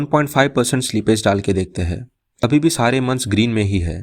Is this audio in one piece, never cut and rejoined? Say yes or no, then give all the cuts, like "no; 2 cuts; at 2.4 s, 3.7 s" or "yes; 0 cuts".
no; 1 cut; at 2.4 s